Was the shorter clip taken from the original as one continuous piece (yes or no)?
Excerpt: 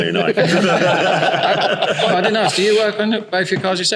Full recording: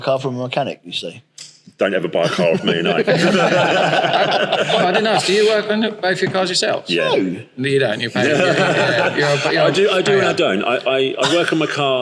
yes